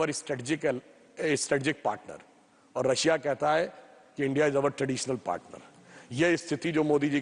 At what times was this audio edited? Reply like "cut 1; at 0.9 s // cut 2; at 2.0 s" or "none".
none